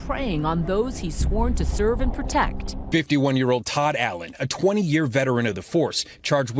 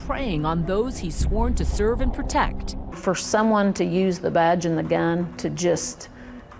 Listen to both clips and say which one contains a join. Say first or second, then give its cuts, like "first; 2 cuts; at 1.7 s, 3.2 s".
first; 1 cut; at 2.9 s